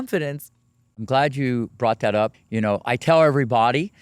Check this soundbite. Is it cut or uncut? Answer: cut